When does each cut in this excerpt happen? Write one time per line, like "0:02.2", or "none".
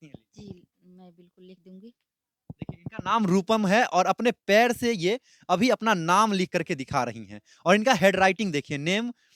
none